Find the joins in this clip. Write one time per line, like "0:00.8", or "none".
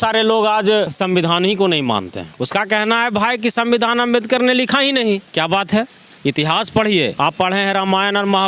0:00.9
0:02.3
0:05.3
0:07.1